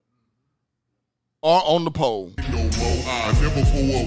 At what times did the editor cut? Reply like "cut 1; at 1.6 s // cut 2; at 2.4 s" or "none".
cut 1; at 2.6 s